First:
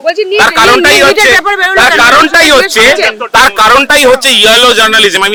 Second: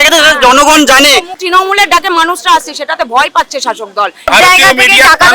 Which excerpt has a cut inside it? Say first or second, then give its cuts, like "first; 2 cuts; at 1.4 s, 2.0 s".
second; 2 cuts; at 1.4 s, 4.3 s